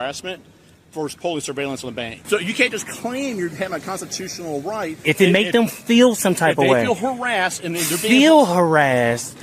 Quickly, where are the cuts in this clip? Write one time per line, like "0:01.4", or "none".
0:02.2
0:05.0